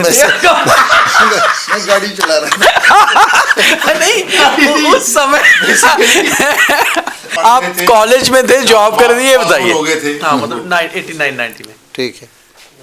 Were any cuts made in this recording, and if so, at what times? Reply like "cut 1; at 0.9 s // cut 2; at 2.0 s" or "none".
cut 1; at 7.3 s